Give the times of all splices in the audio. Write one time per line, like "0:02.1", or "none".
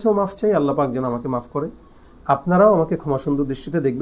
none